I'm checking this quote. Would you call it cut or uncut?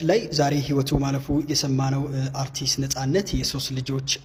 uncut